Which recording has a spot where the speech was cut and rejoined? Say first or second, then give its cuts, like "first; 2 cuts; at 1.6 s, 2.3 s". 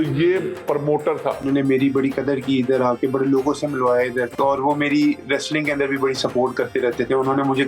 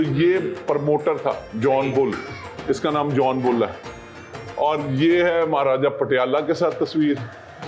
first; 2 cuts; at 1.4 s, 4.3 s